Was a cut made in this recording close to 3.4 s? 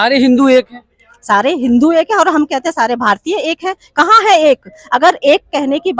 no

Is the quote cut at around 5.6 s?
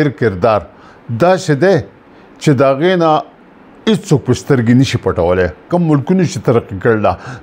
yes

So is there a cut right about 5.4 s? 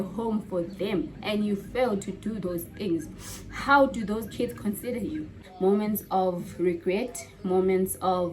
yes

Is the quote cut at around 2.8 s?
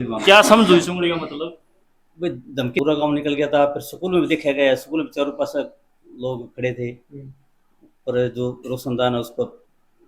yes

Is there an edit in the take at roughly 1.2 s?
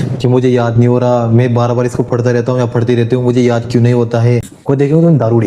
no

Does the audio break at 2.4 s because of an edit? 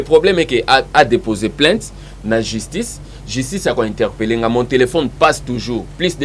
no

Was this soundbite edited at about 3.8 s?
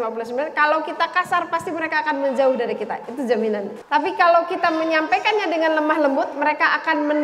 yes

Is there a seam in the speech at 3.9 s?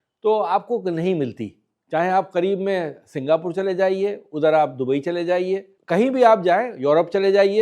no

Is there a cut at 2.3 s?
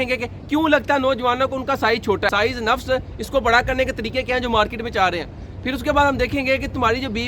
yes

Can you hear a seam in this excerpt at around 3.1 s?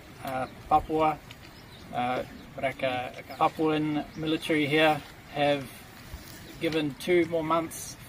yes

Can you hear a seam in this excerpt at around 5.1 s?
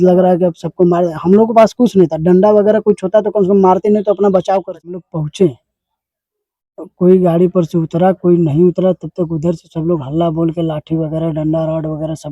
yes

